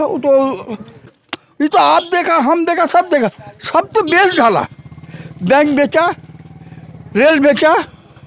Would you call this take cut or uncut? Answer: cut